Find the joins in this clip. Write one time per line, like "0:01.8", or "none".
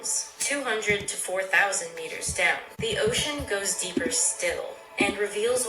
0:02.7